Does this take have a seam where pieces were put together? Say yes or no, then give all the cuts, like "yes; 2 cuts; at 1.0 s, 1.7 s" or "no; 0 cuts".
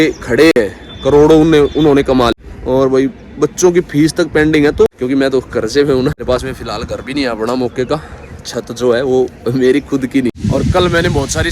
yes; 4 cuts; at 2.3 s, 4.9 s, 6.2 s, 10.3 s